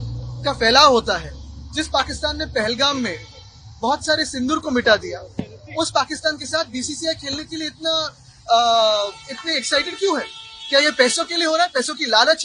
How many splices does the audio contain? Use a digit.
0